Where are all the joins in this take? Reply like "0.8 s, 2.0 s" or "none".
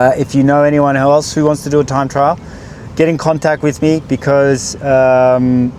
none